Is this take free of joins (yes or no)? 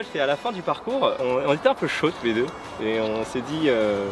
yes